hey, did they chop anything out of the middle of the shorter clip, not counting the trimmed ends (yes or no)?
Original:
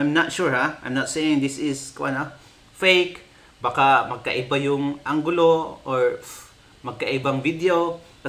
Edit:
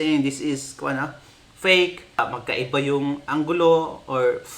yes